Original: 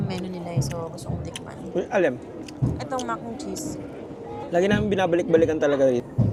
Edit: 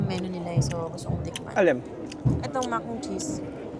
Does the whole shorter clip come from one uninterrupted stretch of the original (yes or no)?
no